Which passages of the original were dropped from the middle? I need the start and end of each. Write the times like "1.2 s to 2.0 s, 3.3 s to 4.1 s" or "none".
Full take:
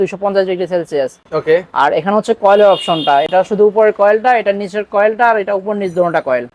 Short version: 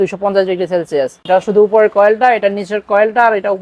1.2 s to 3.3 s